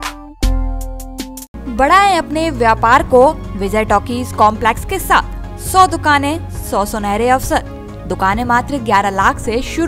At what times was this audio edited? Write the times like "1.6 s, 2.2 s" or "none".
none